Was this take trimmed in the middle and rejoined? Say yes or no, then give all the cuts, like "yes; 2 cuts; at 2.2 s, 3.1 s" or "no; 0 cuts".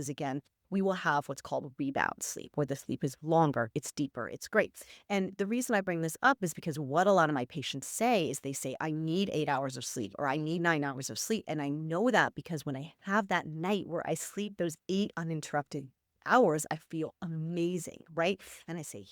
no; 0 cuts